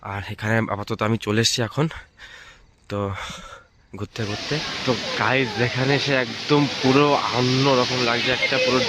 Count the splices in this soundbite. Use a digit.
1